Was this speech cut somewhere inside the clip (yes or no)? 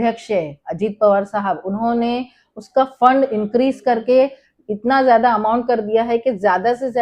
no